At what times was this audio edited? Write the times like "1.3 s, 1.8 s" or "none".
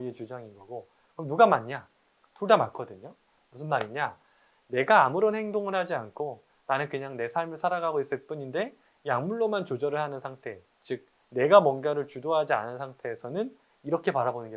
4.6 s